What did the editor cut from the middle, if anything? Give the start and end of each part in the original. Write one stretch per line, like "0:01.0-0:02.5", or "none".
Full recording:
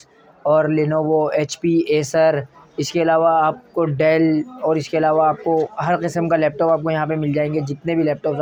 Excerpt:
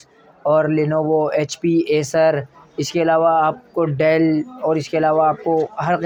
none